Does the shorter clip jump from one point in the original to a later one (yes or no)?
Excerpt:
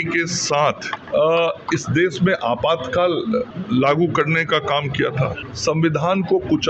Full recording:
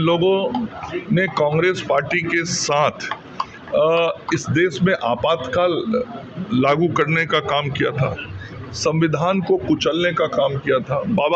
yes